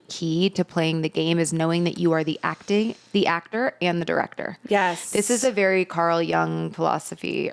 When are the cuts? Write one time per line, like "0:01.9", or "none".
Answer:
none